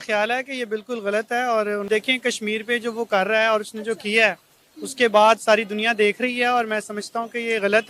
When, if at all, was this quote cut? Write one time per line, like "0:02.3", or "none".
0:01.9